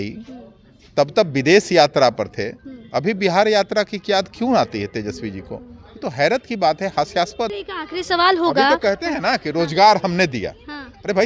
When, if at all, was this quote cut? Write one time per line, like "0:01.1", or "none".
0:07.6

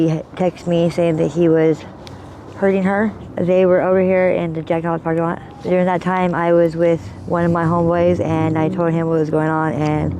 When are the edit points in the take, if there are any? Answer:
0:03.2
0:05.5
0:07.1

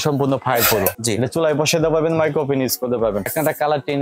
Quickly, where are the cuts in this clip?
0:01.0
0:03.3

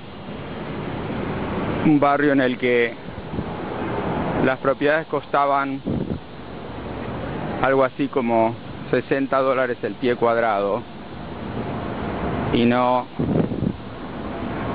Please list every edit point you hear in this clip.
0:01.4

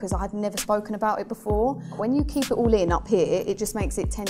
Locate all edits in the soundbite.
0:02.0

